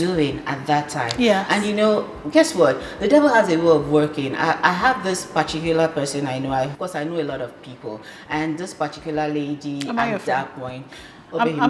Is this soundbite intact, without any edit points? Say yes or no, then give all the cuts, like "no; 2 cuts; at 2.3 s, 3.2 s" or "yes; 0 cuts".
yes; 0 cuts